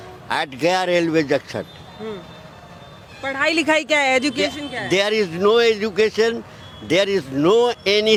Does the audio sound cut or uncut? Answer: uncut